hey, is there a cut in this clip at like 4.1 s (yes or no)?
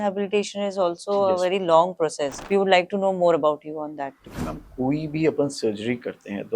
no